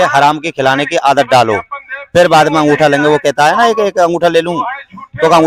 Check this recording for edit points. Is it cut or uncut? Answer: uncut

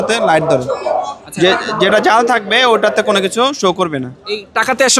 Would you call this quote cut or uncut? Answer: uncut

